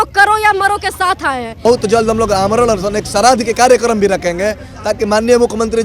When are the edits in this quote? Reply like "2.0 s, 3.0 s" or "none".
1.5 s